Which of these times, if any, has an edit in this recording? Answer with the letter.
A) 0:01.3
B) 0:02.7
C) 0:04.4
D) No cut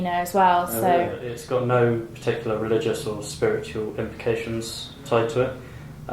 A